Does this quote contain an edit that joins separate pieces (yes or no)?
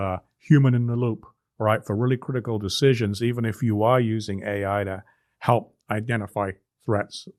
no